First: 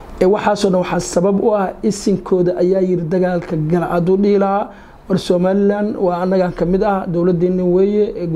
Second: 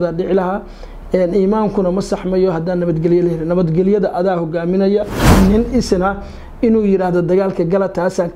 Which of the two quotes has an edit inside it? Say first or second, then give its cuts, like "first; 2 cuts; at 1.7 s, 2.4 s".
second; 1 cut; at 5.2 s